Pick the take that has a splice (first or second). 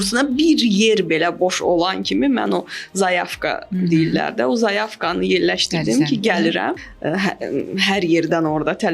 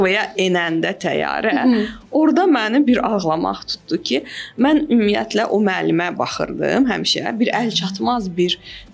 first